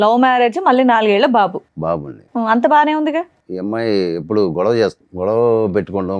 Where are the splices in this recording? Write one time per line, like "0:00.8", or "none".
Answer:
0:03.4
0:05.0